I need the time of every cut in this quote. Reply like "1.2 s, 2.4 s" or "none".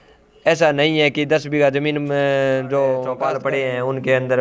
3.2 s